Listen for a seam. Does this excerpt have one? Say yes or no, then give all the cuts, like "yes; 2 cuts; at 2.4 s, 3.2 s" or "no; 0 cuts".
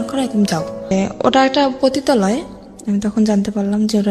yes; 1 cut; at 0.9 s